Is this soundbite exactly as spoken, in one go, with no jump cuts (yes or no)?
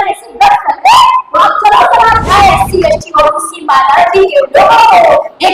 no